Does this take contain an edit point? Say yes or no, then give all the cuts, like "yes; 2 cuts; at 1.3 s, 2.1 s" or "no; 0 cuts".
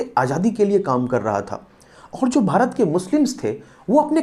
no; 0 cuts